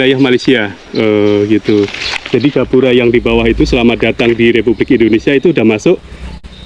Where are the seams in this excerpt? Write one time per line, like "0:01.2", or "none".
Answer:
none